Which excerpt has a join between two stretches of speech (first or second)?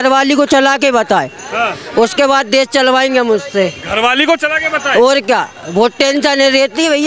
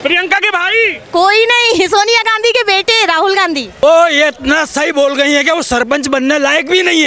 second